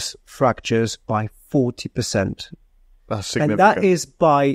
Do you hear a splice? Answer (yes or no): no